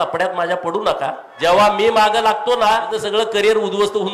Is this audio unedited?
no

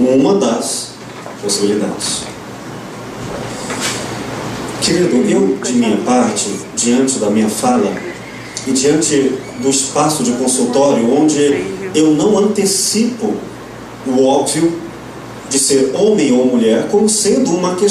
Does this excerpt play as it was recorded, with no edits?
no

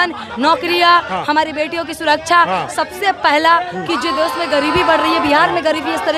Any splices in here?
no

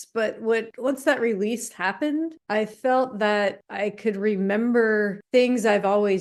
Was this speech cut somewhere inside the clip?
no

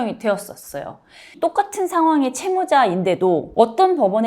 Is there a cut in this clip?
yes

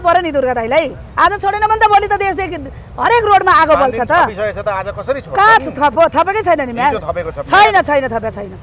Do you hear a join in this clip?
no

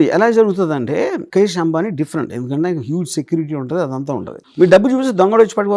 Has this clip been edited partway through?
yes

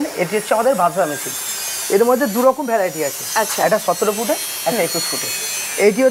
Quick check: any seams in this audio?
no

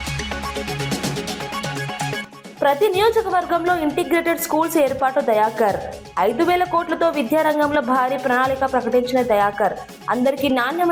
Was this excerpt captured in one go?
no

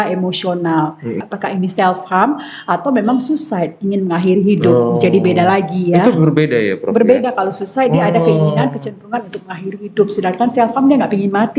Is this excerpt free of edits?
no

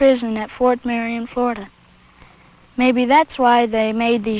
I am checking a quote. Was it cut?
yes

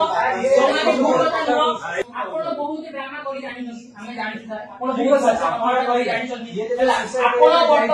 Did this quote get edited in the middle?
yes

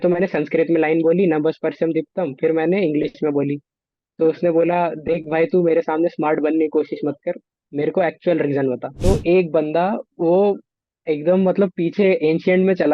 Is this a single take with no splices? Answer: no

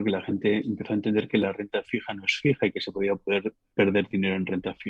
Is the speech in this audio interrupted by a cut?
no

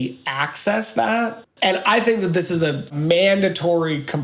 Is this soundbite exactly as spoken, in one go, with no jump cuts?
no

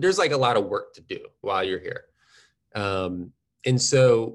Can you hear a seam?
yes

